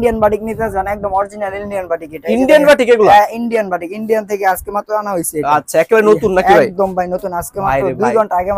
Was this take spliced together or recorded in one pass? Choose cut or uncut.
uncut